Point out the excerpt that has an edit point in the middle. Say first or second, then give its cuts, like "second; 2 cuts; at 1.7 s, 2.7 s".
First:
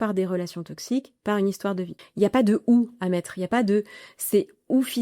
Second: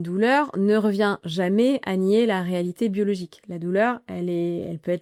first; 1 cut; at 2.0 s